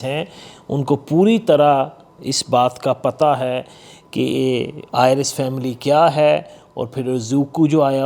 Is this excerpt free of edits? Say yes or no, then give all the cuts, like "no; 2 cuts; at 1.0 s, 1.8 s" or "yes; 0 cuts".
yes; 0 cuts